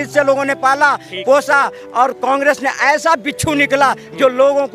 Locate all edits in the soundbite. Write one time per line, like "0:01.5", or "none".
none